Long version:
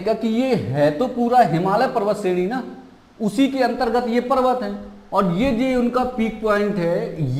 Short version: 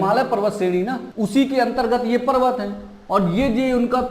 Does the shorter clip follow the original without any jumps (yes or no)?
no